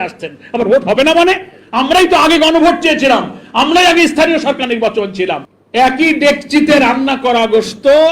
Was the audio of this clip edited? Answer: yes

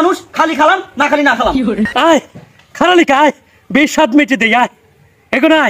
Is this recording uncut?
no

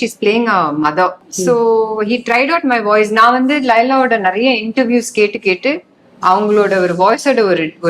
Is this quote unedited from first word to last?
no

